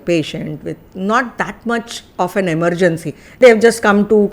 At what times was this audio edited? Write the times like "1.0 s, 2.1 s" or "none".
3.4 s